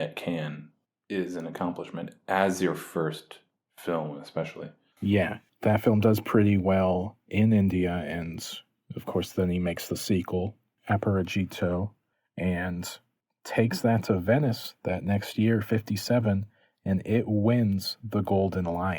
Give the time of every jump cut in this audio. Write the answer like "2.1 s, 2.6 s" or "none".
4.9 s